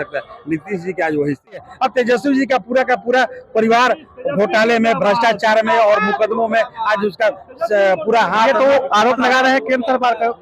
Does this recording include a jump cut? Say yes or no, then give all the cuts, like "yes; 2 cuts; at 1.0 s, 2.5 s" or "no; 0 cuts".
yes; 1 cut; at 1.7 s